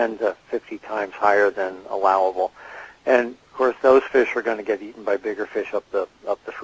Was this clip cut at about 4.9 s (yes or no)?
no